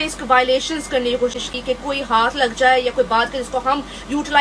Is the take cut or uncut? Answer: uncut